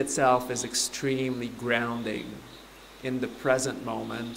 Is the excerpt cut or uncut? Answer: uncut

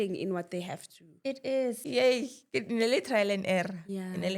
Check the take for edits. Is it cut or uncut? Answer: cut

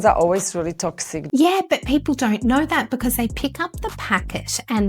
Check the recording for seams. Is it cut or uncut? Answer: cut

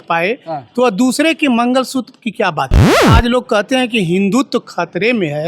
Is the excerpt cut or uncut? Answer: cut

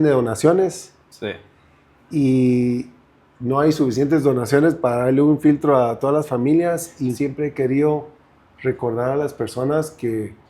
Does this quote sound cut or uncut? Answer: cut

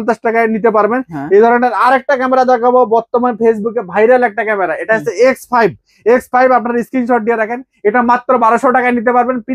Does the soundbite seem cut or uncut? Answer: uncut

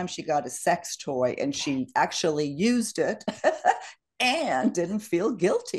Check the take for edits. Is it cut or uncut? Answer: uncut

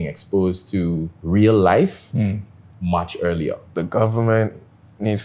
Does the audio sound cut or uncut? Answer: cut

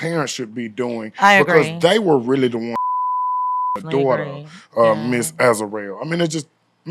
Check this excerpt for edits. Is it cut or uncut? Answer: uncut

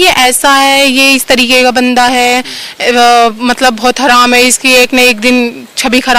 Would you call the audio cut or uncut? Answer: uncut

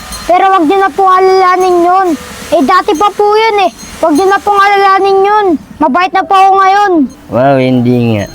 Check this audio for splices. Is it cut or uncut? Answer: cut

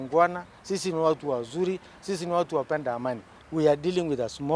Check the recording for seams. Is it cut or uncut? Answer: cut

